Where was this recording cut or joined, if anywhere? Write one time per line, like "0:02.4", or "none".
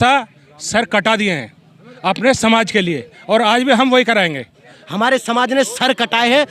0:04.8